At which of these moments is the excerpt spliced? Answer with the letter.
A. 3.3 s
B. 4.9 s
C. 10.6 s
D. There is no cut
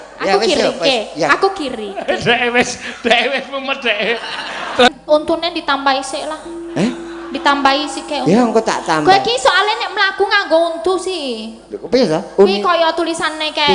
B